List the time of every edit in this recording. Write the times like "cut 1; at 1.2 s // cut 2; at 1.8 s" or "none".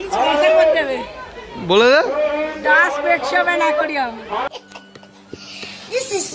cut 1; at 4.5 s